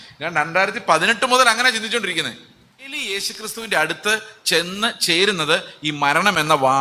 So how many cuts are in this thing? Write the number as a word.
one